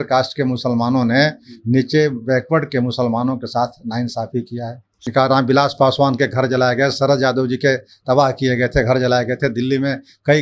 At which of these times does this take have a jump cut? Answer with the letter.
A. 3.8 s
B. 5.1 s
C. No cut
B